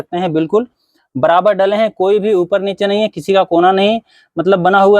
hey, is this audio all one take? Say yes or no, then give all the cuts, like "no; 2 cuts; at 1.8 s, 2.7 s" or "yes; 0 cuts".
yes; 0 cuts